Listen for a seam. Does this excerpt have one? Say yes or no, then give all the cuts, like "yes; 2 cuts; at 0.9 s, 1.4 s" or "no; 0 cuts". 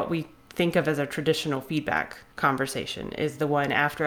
yes; 1 cut; at 2.2 s